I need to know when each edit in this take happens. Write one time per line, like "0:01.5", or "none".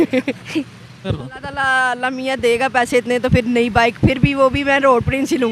0:01.3